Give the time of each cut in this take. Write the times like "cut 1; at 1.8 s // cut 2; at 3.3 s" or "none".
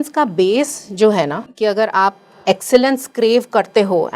cut 1; at 1.4 s